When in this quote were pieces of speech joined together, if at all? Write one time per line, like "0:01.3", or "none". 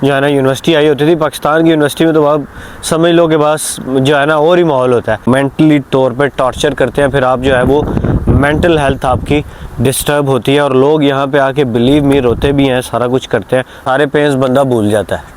0:05.3
0:13.8